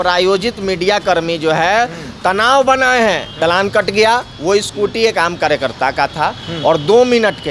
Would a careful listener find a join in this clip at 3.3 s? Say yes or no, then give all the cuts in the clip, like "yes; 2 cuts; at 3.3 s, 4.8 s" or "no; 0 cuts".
yes; 1 cut; at 3.3 s